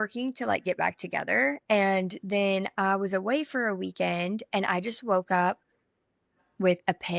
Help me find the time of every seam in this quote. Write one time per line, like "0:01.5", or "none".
0:01.6